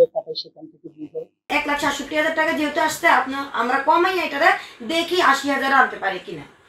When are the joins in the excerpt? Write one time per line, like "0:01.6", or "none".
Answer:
0:01.5